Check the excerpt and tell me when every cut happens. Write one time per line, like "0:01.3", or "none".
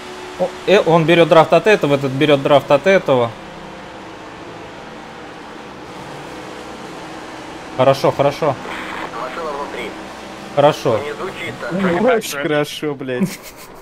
0:12.3